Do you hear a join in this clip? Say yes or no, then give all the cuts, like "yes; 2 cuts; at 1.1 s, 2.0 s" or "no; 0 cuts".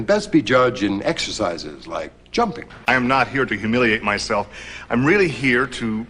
yes; 1 cut; at 2.9 s